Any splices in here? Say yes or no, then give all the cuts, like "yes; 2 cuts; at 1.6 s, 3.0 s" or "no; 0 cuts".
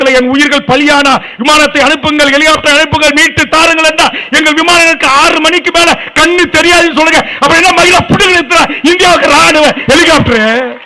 no; 0 cuts